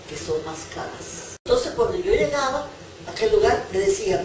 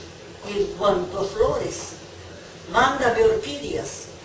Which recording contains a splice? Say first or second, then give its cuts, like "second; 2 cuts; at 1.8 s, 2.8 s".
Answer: first; 1 cut; at 1.4 s